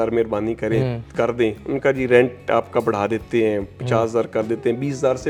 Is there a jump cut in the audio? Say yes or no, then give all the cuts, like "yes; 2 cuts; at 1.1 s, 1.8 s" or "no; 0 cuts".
no; 0 cuts